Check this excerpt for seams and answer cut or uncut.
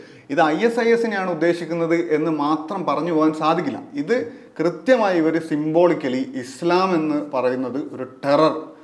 uncut